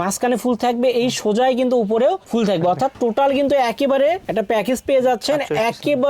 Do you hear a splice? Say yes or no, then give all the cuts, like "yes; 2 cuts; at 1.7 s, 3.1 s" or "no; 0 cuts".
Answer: no; 0 cuts